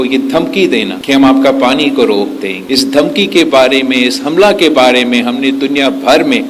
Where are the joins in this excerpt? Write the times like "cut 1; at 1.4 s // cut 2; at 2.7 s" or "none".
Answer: none

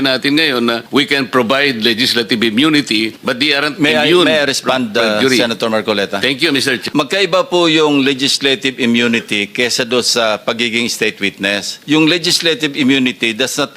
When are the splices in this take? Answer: cut 1; at 0.8 s // cut 2; at 3.2 s // cut 3; at 6.8 s // cut 4; at 11.7 s

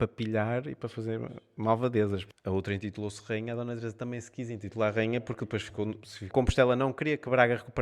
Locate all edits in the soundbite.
cut 1; at 2.3 s // cut 2; at 6.3 s

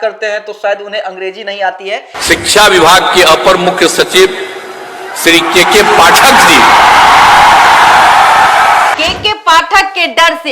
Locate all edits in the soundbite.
cut 1; at 2.1 s // cut 2; at 9.0 s

